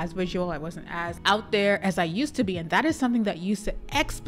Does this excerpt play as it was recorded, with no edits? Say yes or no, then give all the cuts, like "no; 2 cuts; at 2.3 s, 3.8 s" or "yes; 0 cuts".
no; 1 cut; at 1.2 s